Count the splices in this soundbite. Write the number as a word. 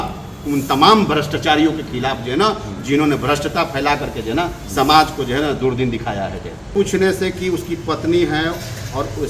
one